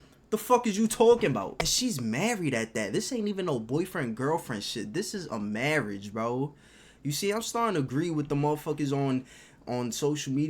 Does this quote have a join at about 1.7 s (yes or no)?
yes